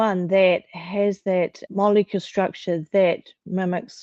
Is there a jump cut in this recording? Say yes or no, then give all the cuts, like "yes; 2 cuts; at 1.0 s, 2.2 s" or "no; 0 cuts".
no; 0 cuts